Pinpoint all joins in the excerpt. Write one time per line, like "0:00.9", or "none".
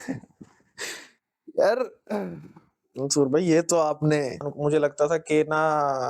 0:04.5

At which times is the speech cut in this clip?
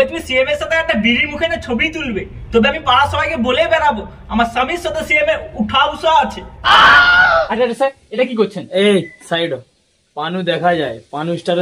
0:07.2

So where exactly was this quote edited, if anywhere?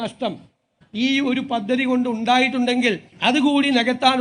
0:03.1

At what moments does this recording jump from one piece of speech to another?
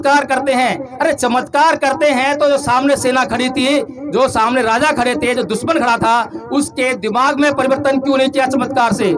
none

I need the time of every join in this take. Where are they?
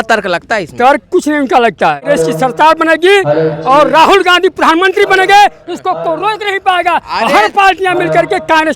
0:02.1

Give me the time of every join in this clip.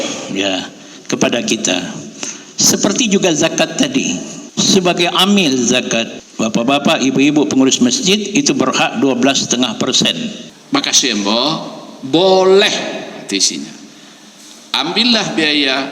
0:04.4
0:06.2
0:10.5

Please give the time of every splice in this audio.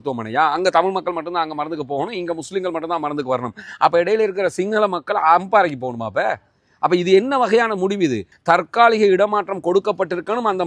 0:08.3

